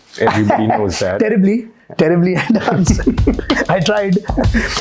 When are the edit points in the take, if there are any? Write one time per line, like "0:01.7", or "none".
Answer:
none